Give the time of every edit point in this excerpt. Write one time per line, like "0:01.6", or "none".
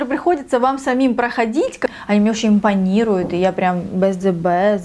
0:01.9